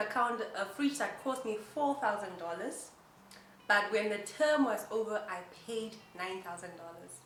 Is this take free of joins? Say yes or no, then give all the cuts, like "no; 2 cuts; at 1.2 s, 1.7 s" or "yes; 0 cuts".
yes; 0 cuts